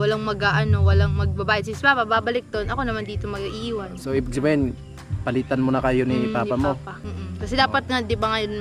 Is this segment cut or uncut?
uncut